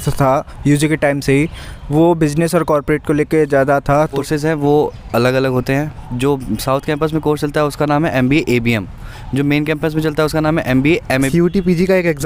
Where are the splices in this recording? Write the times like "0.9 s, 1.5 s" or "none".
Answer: 4.2 s, 11.3 s